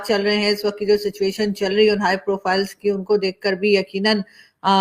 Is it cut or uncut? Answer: uncut